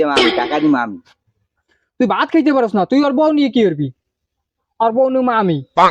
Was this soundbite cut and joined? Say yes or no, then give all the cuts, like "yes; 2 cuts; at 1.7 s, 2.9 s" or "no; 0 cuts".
no; 0 cuts